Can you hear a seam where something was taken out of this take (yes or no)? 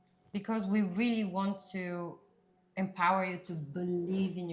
no